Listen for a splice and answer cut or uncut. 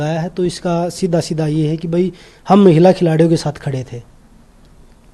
uncut